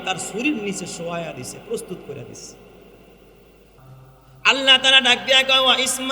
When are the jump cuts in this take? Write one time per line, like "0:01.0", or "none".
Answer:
0:03.8